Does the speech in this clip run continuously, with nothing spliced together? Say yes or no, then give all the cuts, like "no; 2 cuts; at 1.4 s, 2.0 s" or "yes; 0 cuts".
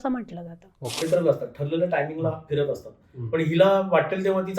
no; 1 cut; at 1.0 s